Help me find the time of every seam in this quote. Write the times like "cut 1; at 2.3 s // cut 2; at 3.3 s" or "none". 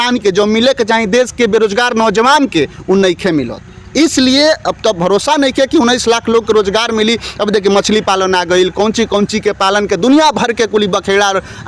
none